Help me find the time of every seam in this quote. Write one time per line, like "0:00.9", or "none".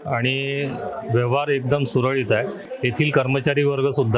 0:02.6